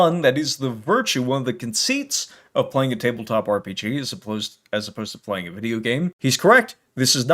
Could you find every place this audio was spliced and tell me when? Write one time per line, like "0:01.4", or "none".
0:06.2